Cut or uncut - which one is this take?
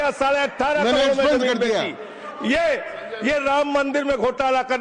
uncut